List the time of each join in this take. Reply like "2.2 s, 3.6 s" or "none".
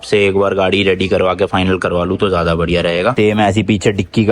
3.1 s